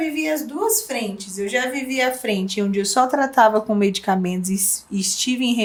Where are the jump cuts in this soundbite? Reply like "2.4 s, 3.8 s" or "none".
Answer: none